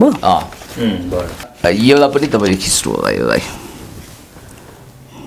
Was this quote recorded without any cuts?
no; 1 cut; at 1.4 s

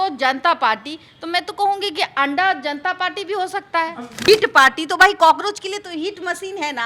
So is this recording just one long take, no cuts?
no; 1 cut; at 4.3 s

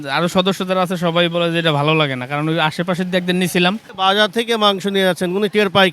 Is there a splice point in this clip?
yes; 1 cut; at 3.9 s

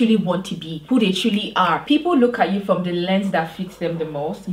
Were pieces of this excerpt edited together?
yes; 1 cut; at 1.8 s

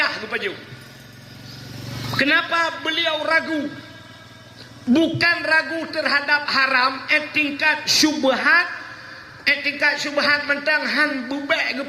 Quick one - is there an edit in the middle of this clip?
no; 0 cuts

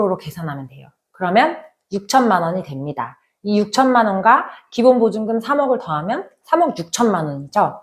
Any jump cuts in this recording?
no; 0 cuts

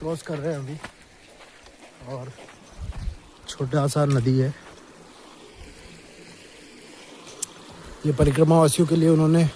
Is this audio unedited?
yes; 0 cuts

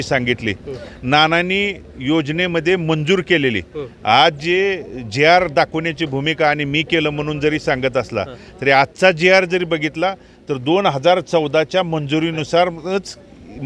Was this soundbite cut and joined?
no; 0 cuts

